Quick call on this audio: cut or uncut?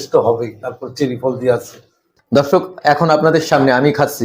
cut